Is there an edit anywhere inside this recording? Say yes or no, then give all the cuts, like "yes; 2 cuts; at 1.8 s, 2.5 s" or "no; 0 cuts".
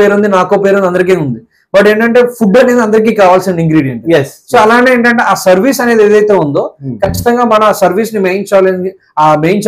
no; 0 cuts